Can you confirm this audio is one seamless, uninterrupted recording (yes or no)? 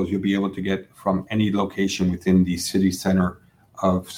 yes